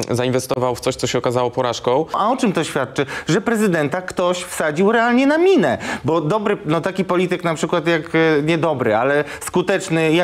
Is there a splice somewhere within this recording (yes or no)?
yes